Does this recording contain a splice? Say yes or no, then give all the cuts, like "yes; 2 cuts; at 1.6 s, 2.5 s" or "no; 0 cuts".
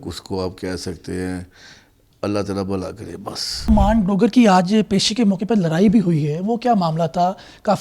yes; 1 cut; at 3.7 s